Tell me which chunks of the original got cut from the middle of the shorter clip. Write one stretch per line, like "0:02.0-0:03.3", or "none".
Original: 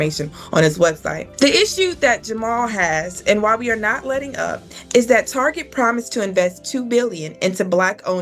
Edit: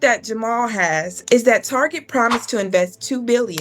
0:03.1-0:04.8

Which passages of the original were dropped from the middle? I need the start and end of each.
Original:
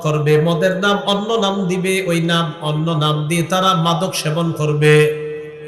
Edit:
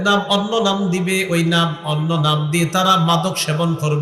none

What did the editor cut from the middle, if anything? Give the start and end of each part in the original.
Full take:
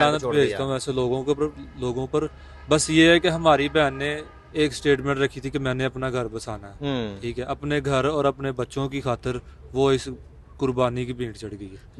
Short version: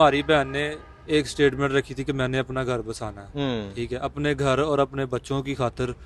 none

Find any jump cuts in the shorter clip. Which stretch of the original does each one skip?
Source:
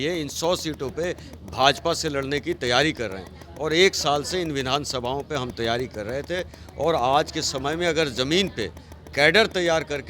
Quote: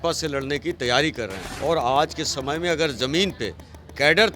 0:03.3-0:06.6

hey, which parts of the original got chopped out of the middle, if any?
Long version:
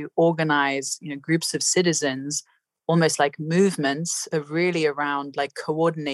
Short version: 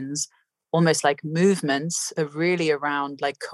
none

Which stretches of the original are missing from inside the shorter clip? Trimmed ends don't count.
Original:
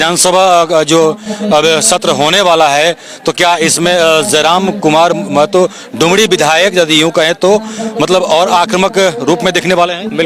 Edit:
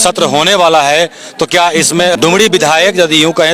0:04.0-0:05.9

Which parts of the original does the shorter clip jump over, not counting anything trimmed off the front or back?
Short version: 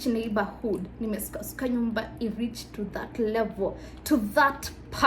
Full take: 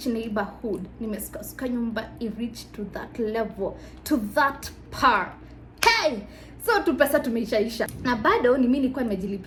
none

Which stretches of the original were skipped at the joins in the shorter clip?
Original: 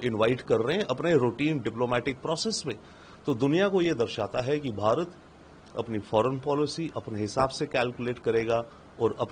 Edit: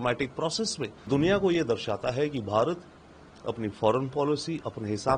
0:02.9-0:03.4

